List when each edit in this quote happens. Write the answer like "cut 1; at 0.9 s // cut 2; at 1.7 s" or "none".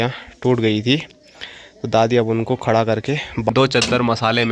cut 1; at 3.5 s